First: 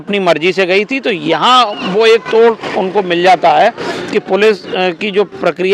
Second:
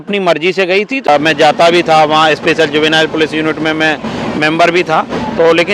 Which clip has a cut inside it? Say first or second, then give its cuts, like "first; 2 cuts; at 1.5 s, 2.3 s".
second; 1 cut; at 1.1 s